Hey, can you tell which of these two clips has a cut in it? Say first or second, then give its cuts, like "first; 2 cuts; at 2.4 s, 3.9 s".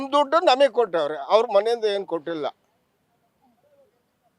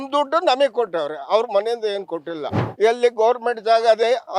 second; 1 cut; at 2.6 s